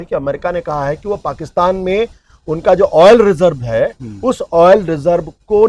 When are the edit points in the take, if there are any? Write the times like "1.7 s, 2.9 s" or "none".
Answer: none